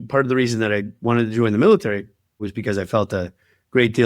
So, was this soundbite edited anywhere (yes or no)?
yes